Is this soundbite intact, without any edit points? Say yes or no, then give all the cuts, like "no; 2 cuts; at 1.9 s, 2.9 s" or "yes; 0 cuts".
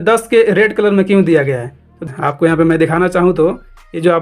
no; 1 cut; at 2.0 s